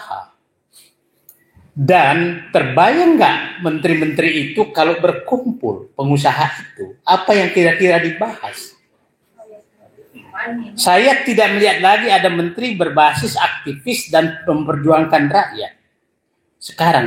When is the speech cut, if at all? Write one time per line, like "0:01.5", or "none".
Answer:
0:02.4